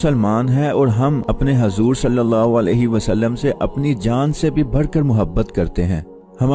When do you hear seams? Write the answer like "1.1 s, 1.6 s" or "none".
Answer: 1.3 s